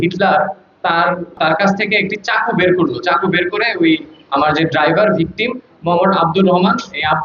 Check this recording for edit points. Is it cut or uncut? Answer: cut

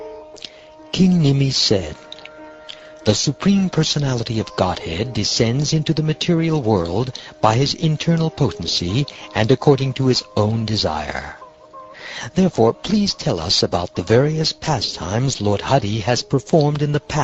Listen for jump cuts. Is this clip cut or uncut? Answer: cut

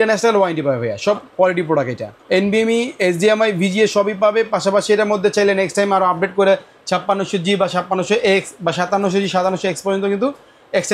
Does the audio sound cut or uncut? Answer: cut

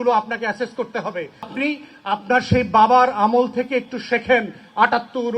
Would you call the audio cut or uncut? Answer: cut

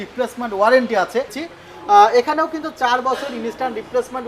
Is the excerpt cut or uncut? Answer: cut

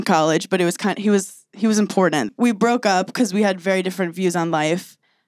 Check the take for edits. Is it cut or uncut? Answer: cut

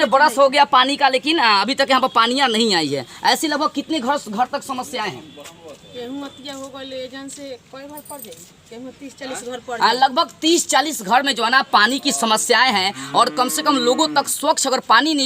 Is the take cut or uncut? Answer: uncut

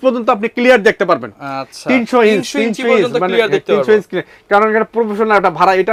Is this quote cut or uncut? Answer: uncut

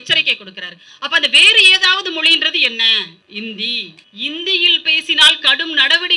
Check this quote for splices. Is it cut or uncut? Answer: cut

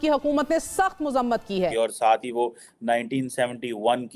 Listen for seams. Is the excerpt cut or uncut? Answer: cut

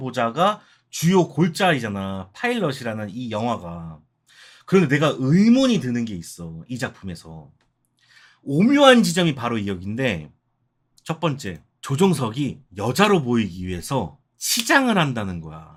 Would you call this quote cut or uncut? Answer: uncut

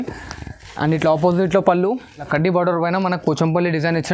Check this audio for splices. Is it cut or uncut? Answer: cut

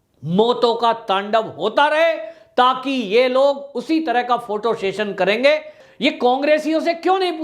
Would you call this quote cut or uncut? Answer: cut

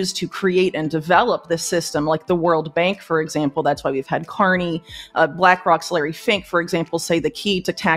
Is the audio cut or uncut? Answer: uncut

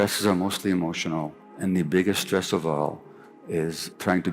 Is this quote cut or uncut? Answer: cut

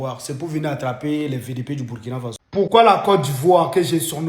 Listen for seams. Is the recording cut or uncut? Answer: cut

